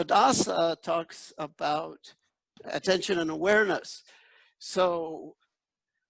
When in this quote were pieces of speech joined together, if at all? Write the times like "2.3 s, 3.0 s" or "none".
2.5 s